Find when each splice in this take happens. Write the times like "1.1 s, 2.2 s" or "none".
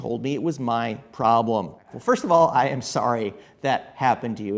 none